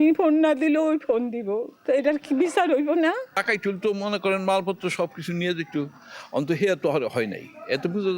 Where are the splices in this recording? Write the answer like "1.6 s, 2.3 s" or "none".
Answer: 1.7 s, 3.4 s